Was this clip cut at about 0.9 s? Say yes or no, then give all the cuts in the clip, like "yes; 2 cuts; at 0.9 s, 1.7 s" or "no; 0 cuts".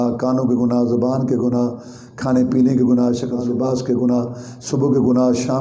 no; 1 cut; at 3.4 s